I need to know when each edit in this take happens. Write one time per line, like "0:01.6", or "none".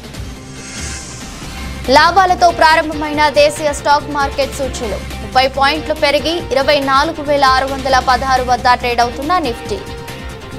0:01.0